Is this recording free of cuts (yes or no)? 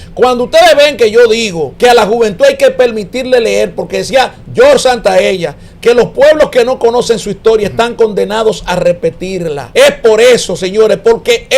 no